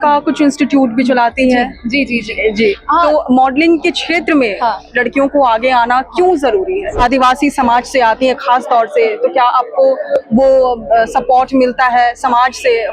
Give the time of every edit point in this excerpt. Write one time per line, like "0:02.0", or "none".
0:07.0